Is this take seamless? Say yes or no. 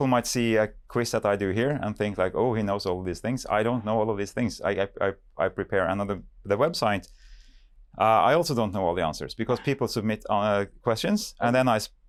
yes